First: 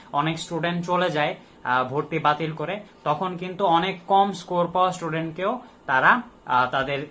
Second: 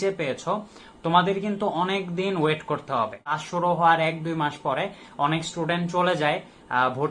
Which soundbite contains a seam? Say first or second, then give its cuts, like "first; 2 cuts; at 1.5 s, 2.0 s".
second; 1 cut; at 3.4 s